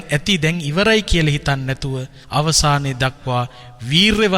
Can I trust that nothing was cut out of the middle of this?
no; 1 cut; at 2.1 s

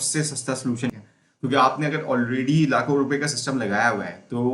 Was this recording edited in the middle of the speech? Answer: yes; 1 cut; at 0.9 s

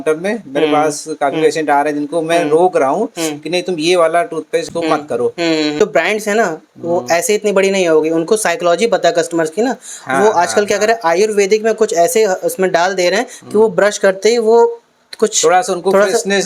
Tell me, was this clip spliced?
yes; 2 cuts; at 4.7 s, 5.8 s

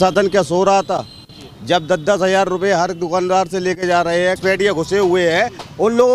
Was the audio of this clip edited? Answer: yes; 1 cut; at 4.4 s

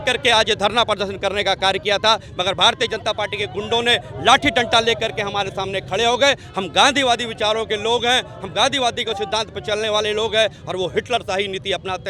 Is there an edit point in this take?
no; 0 cuts

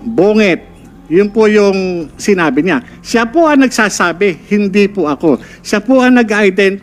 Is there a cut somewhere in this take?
no; 0 cuts

